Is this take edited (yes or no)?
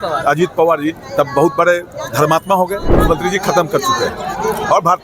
yes